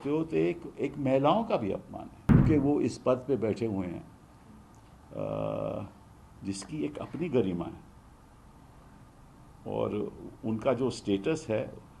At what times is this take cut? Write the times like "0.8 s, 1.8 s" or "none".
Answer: 2.4 s